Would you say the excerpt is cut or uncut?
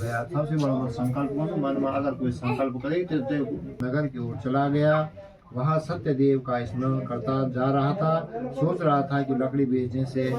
cut